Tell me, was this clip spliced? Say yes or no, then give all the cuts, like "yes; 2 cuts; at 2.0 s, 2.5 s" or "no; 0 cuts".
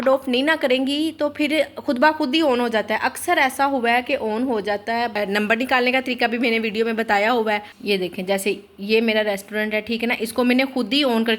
yes; 2 cuts; at 5.2 s, 7.7 s